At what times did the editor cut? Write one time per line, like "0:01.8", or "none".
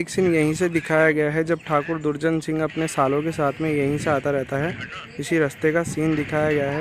none